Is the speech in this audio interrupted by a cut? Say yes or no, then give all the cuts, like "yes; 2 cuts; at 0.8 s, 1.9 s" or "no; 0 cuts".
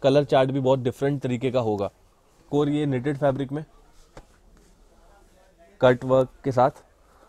yes; 1 cut; at 2.4 s